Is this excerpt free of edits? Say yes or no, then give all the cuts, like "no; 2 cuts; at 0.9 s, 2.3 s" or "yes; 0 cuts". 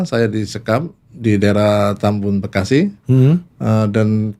yes; 0 cuts